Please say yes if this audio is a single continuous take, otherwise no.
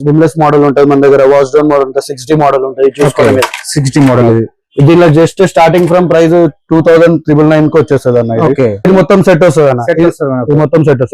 no